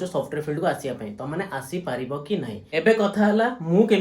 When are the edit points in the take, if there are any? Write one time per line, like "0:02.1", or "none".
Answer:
0:02.5